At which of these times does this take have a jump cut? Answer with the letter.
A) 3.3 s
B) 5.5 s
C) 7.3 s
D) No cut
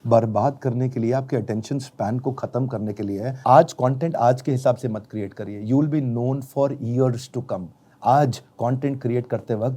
A